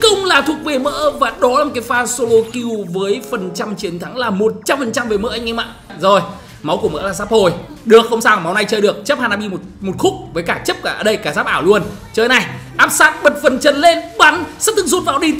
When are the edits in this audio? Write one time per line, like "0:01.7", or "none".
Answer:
0:05.9